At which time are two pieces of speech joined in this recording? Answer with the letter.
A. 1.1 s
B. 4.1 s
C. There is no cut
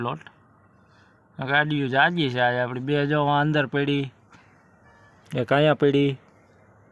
C